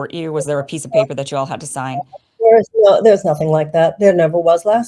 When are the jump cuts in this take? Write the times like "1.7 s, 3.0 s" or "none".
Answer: none